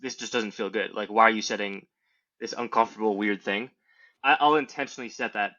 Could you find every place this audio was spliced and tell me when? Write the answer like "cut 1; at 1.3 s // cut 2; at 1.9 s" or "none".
cut 1; at 4.1 s

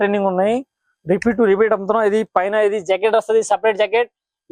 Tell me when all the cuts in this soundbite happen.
none

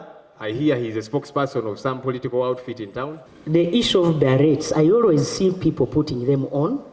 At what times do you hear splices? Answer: cut 1; at 3.3 s

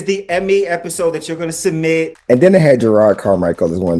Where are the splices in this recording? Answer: cut 1; at 2.1 s

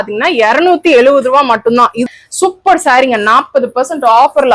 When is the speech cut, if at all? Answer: cut 1; at 2.0 s

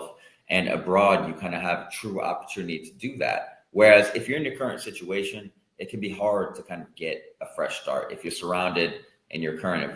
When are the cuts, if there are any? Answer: none

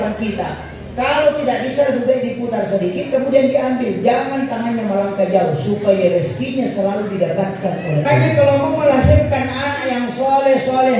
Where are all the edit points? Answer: cut 1; at 8.0 s

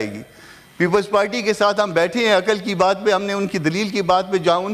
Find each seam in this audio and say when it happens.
none

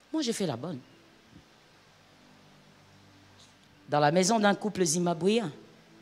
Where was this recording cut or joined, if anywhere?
none

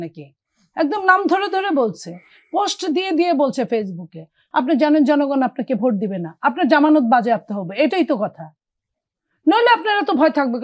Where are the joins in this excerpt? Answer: cut 1; at 4.4 s

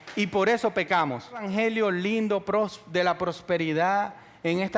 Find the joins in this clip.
cut 1; at 1.5 s

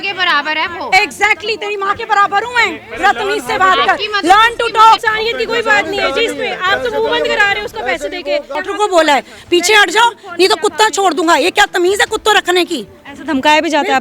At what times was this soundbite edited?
cut 1; at 5.1 s // cut 2; at 8.5 s

